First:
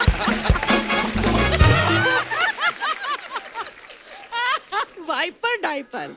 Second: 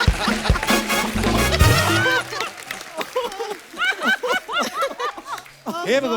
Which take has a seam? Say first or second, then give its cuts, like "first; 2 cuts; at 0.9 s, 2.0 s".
first; 1 cut; at 2.3 s